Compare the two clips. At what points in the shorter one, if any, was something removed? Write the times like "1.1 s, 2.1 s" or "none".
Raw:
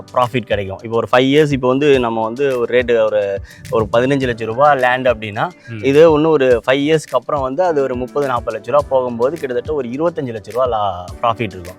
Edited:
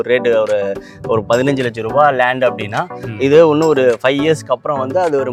none